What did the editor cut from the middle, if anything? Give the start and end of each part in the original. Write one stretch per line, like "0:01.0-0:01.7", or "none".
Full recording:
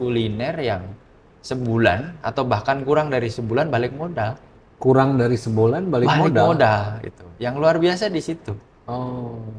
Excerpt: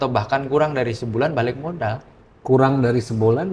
none